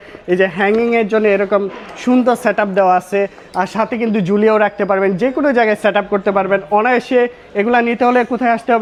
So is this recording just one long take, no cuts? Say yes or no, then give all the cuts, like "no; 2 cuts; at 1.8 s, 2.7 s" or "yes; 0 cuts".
yes; 0 cuts